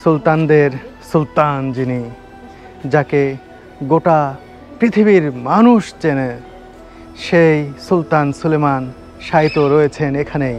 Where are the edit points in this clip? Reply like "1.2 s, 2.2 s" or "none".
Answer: none

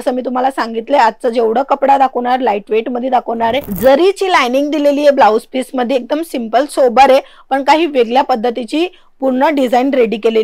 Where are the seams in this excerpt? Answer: 3.7 s

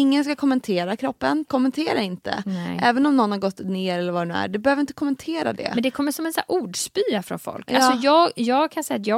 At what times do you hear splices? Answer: 1.5 s

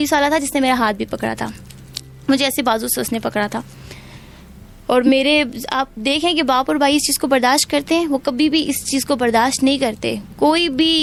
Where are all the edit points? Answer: none

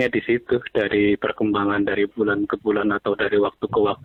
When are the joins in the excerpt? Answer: none

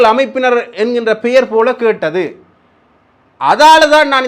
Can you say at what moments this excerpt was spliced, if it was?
none

